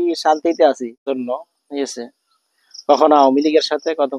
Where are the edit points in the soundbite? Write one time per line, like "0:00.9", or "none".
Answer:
0:01.2